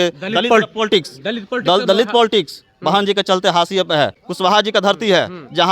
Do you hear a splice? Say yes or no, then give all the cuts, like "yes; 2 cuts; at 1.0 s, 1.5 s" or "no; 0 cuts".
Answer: yes; 1 cut; at 4.2 s